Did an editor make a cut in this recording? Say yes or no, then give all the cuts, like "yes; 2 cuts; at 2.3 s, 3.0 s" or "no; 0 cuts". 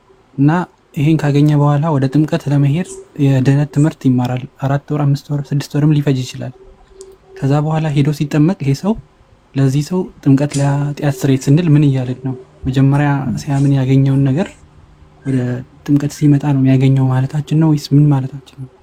no; 0 cuts